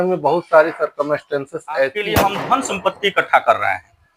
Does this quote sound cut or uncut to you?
cut